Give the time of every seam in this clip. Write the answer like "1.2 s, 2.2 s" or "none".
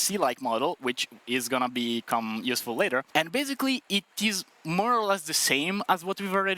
3.1 s